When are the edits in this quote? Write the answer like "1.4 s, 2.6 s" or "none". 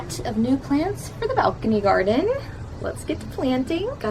none

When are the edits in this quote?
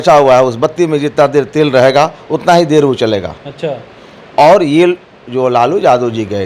none

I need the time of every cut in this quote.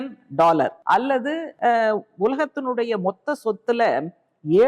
1.2 s

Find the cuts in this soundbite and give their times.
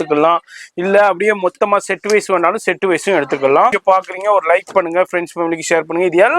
3.8 s

